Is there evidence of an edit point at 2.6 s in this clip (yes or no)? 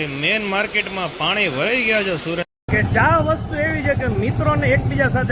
yes